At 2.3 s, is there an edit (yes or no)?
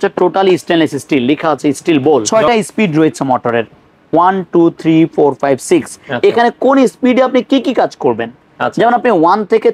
yes